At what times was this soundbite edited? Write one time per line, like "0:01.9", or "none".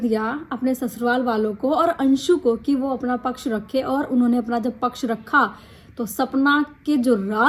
none